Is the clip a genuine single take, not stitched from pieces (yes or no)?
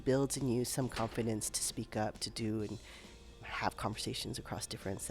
no